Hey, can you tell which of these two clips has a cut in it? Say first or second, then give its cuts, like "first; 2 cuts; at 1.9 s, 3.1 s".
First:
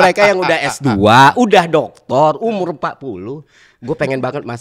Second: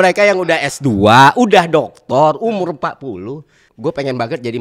second; 1 cut; at 3.6 s